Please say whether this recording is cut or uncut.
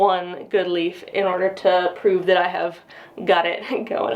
uncut